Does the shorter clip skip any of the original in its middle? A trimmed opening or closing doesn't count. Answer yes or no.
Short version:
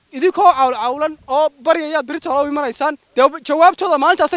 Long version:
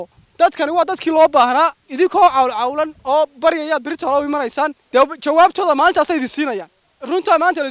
no